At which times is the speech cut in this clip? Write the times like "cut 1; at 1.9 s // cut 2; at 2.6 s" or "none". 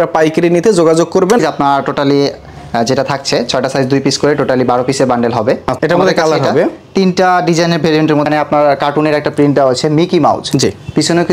cut 1; at 1.4 s // cut 2; at 5.7 s // cut 3; at 8.3 s